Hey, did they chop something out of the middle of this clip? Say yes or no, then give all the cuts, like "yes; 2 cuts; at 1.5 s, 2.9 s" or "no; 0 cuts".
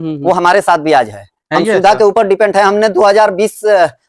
no; 0 cuts